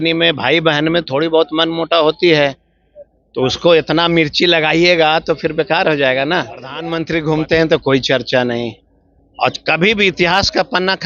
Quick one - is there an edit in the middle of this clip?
yes; 1 cut; at 6.9 s

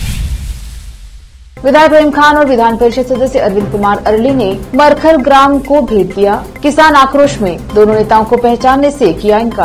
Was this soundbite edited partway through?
yes; 1 cut; at 1.0 s

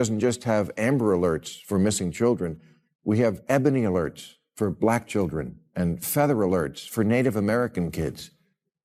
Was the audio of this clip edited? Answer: no; 0 cuts

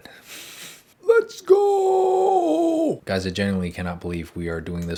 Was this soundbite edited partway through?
no; 0 cuts

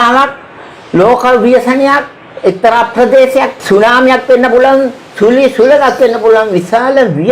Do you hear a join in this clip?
yes; 1 cut; at 3.6 s

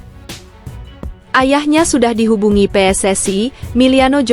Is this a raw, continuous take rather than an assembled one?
no; 1 cut; at 1.2 s

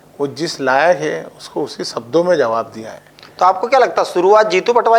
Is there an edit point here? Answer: no; 0 cuts

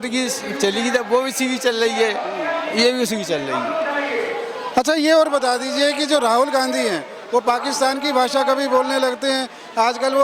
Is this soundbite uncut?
yes; 0 cuts

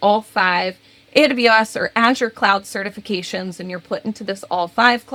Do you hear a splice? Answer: no; 0 cuts

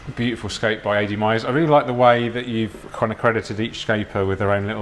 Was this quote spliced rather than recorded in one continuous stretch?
no; 0 cuts

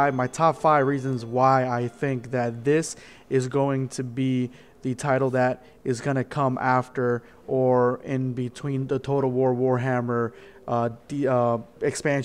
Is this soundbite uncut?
no; 1 cut; at 8.0 s

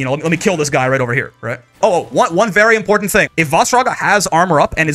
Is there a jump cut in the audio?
yes; 2 cuts; at 1.8 s, 3.3 s

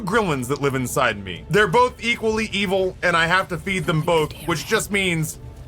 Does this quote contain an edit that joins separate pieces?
yes; 1 cut; at 1.3 s

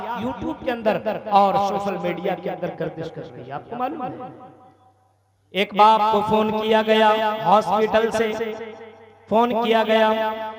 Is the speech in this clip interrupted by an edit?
no; 0 cuts

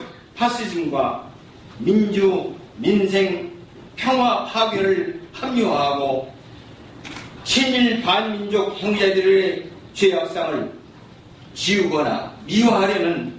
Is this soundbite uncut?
no; 1 cut; at 1.7 s

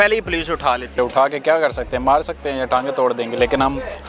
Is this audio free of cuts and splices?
no; 1 cut; at 1.0 s

